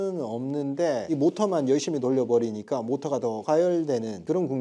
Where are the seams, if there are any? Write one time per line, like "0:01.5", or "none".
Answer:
none